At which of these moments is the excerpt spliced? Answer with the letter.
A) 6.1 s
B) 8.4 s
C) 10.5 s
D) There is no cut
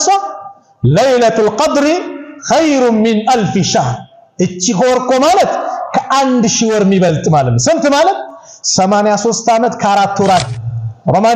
C